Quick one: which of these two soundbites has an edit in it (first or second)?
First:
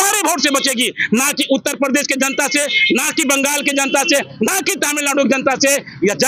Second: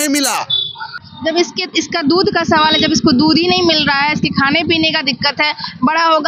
second